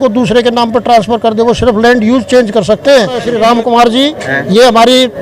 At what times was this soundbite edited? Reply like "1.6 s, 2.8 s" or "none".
3.3 s

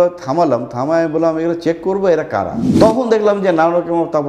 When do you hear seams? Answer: 2.6 s

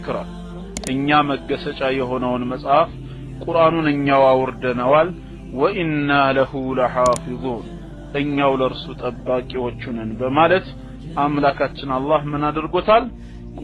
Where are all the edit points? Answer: none

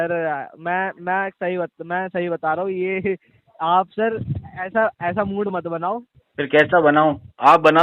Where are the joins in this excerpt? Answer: 6.2 s

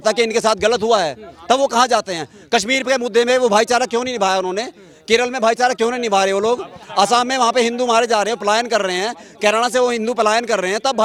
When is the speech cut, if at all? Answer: none

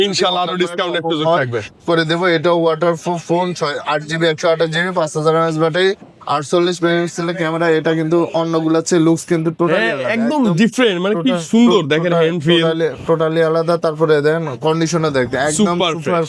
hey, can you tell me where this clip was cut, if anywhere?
none

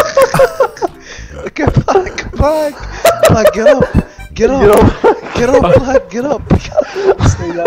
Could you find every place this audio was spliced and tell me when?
none

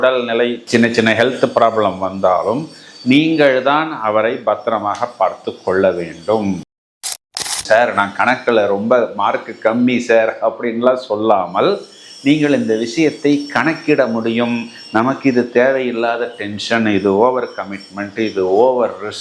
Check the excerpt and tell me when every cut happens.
7.1 s

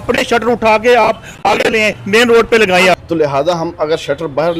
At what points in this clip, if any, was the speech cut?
2.9 s

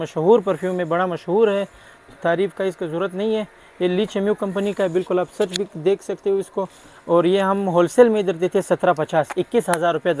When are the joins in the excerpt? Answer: none

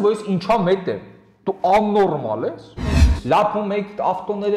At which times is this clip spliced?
3.0 s

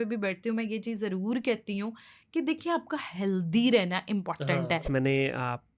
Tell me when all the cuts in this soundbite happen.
4.9 s

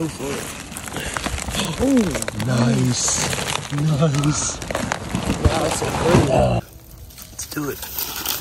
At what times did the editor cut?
6.6 s

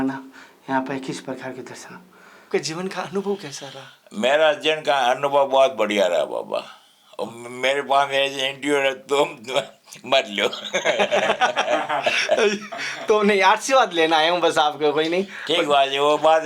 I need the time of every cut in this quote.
2.5 s

